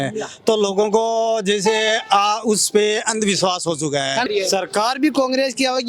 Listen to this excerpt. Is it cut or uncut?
cut